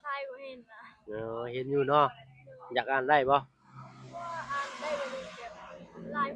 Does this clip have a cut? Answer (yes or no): no